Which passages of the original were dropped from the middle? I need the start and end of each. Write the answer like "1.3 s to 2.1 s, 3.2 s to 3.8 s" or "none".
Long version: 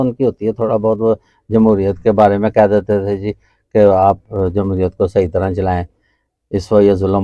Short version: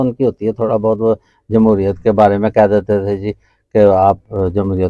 none